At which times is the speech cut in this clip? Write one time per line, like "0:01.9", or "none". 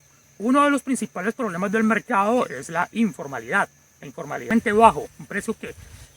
0:04.5